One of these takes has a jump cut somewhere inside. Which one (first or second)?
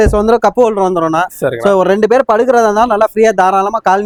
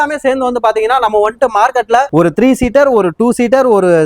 second